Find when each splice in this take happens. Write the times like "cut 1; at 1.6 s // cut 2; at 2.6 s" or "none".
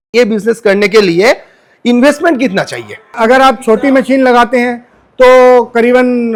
none